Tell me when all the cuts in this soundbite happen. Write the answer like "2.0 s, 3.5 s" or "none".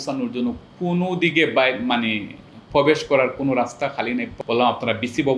4.3 s